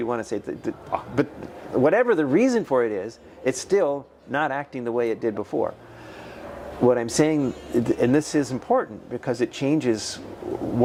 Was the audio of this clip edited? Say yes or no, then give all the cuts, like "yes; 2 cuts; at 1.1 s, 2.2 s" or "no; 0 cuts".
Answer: no; 0 cuts